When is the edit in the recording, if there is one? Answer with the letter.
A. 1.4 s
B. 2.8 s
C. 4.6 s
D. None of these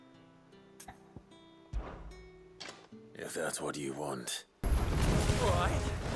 C